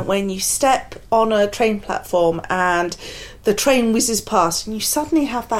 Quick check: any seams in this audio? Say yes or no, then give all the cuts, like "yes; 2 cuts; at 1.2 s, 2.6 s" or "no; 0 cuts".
no; 0 cuts